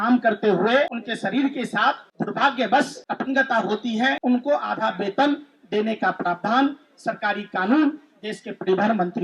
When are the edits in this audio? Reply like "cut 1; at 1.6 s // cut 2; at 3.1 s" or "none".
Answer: cut 1; at 1.0 s // cut 2; at 2.1 s // cut 3; at 3.0 s // cut 4; at 4.2 s